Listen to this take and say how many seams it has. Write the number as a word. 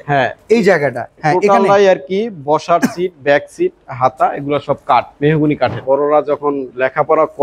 two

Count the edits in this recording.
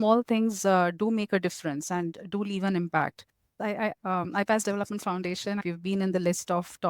two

